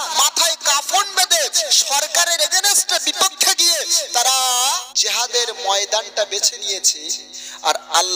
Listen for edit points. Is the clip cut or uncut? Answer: cut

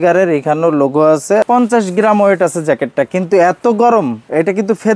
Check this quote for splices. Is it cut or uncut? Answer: cut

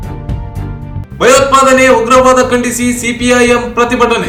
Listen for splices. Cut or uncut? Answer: uncut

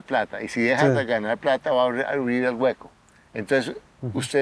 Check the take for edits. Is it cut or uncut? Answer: uncut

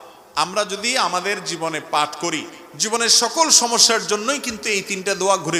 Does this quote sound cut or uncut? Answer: uncut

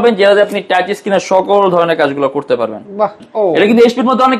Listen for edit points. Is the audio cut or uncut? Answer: cut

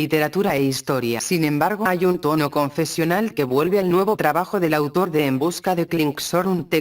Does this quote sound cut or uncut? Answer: cut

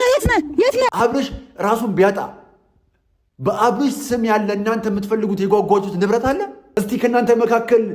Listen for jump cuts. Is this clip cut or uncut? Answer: cut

